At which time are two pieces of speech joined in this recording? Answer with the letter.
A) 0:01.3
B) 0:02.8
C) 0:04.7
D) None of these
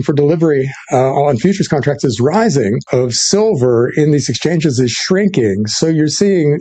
B